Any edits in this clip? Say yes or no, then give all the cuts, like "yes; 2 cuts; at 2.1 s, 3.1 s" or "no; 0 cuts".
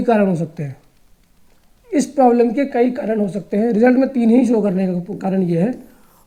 no; 0 cuts